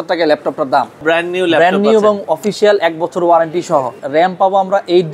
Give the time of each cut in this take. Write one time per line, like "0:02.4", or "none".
0:01.0
0:04.0